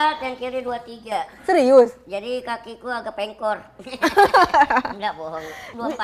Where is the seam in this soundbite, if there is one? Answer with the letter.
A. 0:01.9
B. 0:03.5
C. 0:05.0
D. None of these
D